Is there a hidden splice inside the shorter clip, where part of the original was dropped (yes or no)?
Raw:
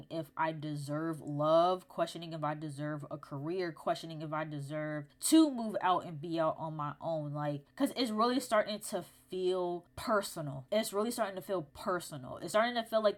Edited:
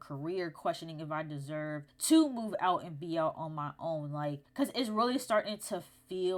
no